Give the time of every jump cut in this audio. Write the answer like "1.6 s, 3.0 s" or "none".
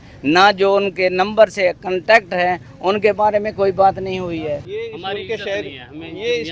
none